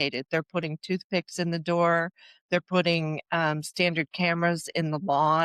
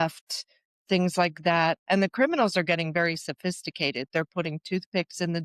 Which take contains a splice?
second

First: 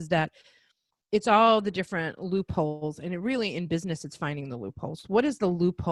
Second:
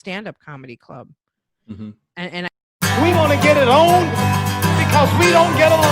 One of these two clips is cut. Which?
second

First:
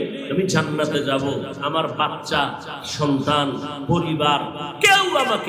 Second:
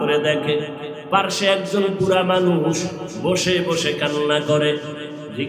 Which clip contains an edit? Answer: first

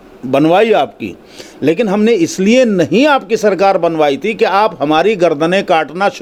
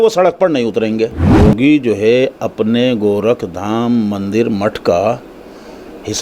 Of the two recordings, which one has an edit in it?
second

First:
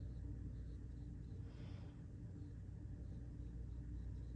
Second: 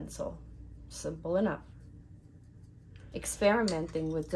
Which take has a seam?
second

